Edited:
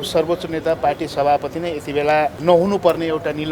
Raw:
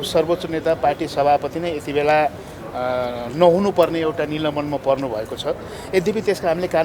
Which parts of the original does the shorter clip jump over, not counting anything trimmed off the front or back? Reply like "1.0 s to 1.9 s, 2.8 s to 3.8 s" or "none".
2.4 s to 3.3 s